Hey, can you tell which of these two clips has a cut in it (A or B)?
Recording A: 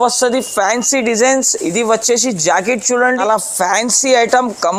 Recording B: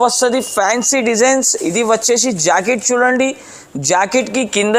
A